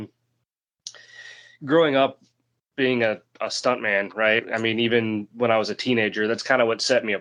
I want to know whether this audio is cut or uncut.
uncut